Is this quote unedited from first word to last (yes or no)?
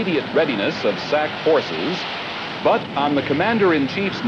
yes